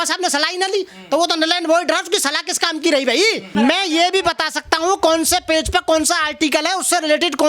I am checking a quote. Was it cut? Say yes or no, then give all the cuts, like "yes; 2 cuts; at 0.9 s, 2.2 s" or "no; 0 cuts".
yes; 1 cut; at 3.5 s